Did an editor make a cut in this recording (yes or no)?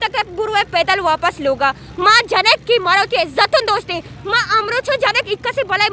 no